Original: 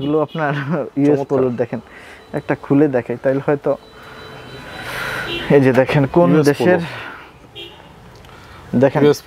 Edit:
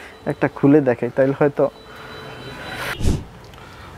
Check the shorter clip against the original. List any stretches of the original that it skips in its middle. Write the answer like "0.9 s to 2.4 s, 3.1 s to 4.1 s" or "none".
5.0 s to 7.6 s